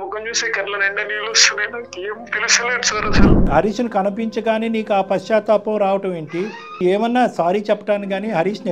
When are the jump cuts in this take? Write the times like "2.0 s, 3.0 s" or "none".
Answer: 3.5 s, 6.8 s